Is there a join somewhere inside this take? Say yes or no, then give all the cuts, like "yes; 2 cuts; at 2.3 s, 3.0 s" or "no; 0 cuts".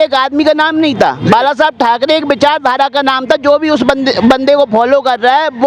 no; 0 cuts